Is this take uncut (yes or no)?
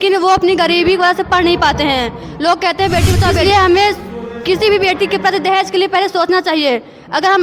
no